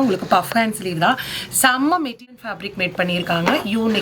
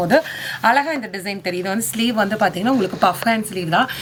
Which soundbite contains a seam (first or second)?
first